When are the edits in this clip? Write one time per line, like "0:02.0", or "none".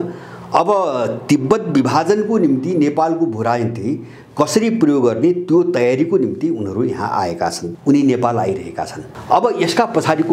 0:07.6
0:09.0